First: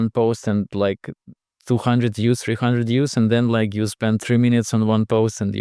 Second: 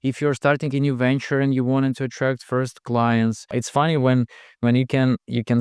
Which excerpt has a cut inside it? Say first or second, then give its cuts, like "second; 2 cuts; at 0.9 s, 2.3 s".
second; 1 cut; at 3.4 s